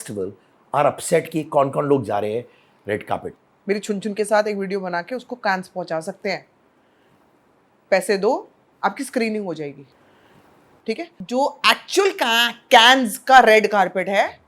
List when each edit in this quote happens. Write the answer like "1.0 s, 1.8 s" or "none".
3.3 s, 11.1 s